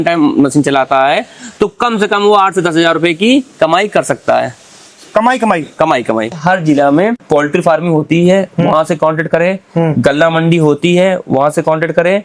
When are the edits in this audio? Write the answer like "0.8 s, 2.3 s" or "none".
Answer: 6.4 s, 7.2 s